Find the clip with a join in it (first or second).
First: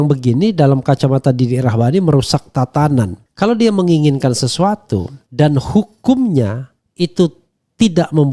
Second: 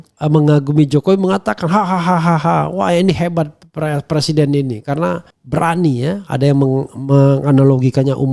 first